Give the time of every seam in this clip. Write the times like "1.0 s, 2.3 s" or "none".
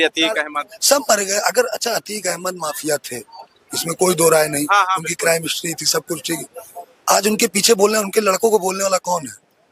none